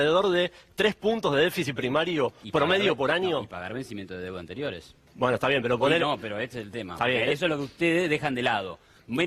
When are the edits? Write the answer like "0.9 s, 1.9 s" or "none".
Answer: none